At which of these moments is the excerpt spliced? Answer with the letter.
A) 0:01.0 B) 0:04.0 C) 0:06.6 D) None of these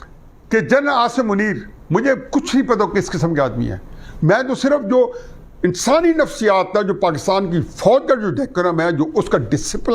D